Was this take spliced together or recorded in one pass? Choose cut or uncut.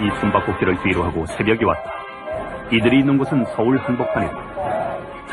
uncut